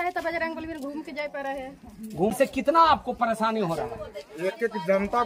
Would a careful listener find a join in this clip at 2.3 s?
yes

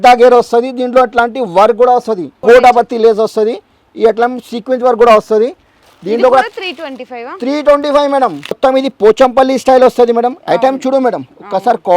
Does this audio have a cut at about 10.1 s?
no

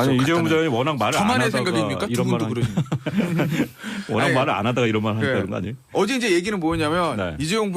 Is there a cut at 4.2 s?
yes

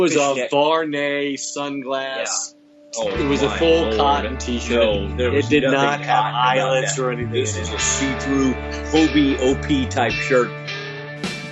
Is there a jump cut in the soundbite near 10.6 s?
yes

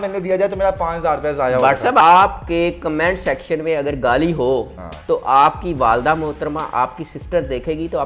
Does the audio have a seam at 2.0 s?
yes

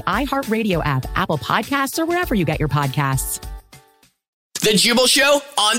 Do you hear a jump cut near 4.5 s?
yes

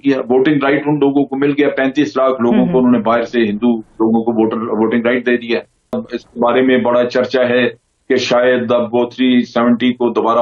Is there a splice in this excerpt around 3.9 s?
no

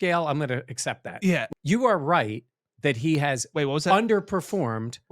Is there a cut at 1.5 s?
yes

